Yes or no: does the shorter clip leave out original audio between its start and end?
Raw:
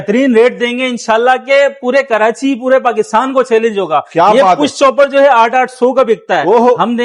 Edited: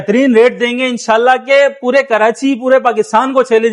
no